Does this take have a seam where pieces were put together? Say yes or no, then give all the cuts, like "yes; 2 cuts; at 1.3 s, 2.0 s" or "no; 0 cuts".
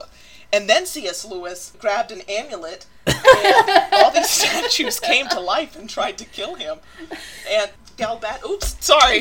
yes; 2 cuts; at 1.6 s, 7.8 s